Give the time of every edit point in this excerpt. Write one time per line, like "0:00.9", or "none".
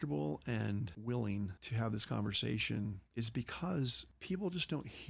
0:00.9
0:01.6
0:03.0
0:04.1